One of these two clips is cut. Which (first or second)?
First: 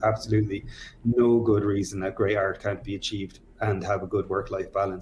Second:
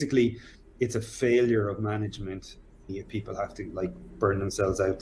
second